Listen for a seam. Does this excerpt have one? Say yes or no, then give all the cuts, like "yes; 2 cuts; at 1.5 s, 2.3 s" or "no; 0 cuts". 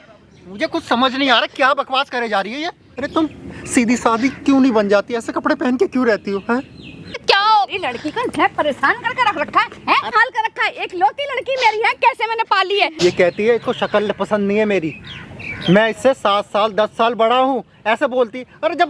yes; 4 cuts; at 2.9 s, 7.2 s, 10.1 s, 12.9 s